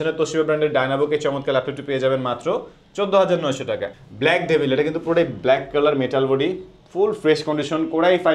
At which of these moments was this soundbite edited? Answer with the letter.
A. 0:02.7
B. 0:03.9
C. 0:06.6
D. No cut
B